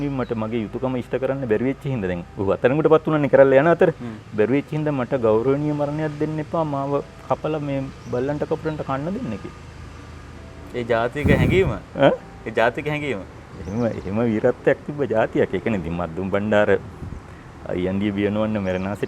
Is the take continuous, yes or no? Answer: yes